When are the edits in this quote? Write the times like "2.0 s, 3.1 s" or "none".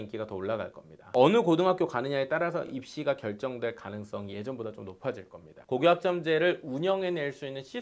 5.6 s